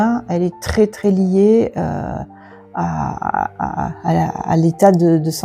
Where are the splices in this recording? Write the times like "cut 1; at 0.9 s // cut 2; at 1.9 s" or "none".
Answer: none